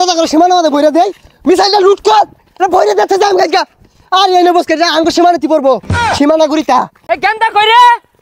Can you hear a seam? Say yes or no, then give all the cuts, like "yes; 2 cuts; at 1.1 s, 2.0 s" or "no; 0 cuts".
no; 0 cuts